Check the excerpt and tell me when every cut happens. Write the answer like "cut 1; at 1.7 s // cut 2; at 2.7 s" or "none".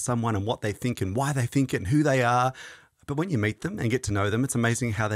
none